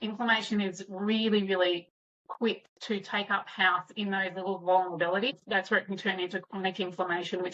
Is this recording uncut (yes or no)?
no